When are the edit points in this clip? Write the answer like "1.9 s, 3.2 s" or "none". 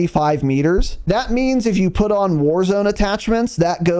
0.9 s